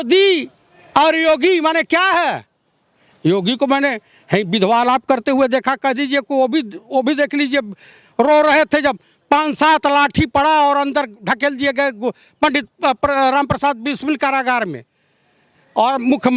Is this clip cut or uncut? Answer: uncut